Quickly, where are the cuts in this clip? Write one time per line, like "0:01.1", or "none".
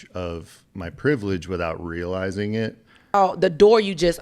0:03.1

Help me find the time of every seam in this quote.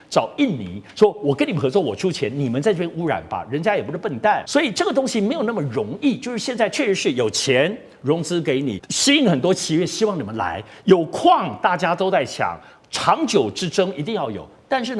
0:04.4
0:08.9

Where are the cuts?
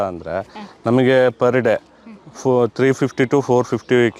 none

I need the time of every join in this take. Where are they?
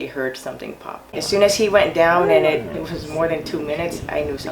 0:01.0
0:02.7

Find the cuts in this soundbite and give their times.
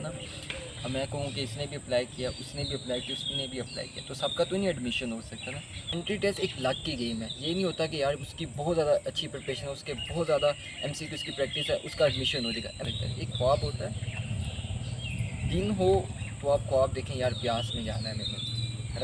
0:05.9
0:12.9

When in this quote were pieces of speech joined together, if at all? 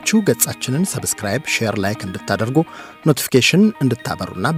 none

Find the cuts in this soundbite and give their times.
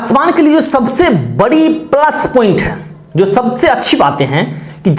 none

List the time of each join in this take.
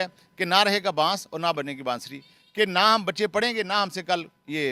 none

